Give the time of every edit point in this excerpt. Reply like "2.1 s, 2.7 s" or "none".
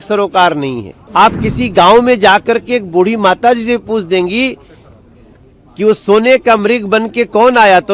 0.9 s